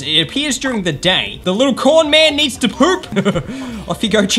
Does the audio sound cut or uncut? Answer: cut